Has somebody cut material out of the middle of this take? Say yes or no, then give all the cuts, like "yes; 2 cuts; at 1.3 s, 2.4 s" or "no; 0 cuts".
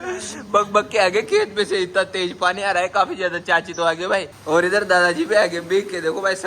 no; 0 cuts